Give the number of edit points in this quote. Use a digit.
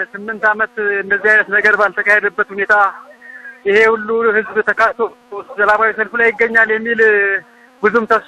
0